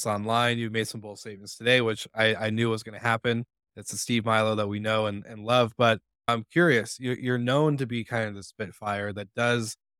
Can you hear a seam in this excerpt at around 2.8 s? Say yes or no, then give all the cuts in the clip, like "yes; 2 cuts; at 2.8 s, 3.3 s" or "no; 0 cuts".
no; 1 cut; at 6.3 s